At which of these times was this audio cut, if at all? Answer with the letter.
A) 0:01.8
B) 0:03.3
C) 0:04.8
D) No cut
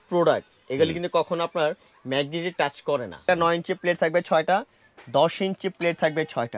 B